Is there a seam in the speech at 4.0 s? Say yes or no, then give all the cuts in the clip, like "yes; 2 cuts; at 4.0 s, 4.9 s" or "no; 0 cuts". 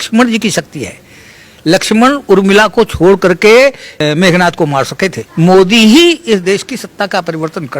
yes; 2 cuts; at 4.0 s, 5.2 s